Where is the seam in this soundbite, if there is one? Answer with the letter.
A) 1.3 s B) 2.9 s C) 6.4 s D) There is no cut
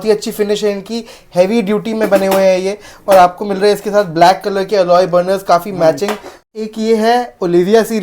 C